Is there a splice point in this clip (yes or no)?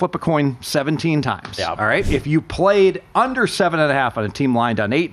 yes